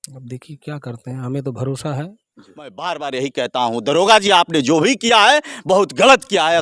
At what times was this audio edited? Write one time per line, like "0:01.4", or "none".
0:02.7